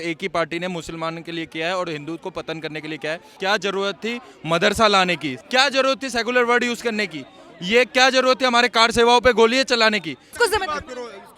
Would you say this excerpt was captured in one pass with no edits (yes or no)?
no